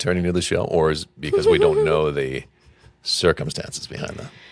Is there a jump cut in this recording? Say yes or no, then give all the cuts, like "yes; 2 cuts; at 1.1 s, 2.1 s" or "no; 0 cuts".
no; 0 cuts